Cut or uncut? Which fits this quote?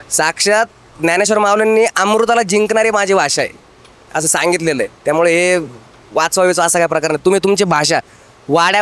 uncut